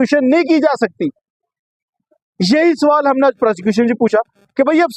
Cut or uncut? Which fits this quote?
uncut